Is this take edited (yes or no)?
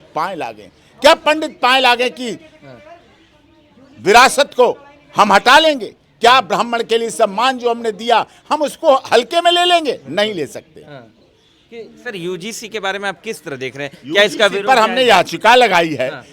no